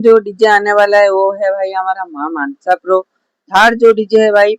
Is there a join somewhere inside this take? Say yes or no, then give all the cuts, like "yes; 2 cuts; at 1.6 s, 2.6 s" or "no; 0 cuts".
no; 0 cuts